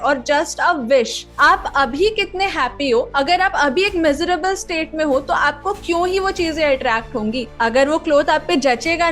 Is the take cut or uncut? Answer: cut